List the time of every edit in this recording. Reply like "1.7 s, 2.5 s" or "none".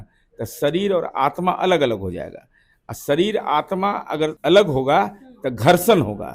4.4 s